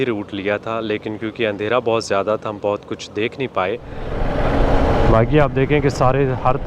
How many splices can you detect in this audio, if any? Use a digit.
1